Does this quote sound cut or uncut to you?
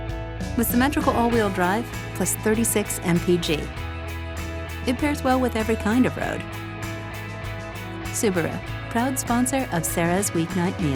uncut